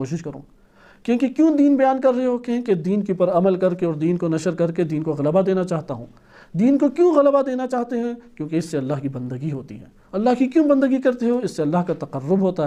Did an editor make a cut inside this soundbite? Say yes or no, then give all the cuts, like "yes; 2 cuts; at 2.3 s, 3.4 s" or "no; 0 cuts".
no; 0 cuts